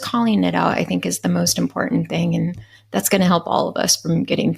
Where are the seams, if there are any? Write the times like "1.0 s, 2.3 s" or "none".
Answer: none